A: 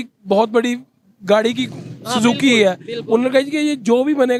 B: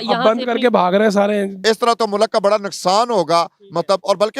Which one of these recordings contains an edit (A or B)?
B